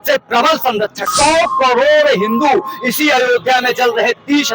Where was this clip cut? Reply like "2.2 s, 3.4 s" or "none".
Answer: 1.1 s